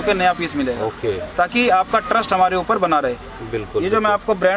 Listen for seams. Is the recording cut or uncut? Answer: uncut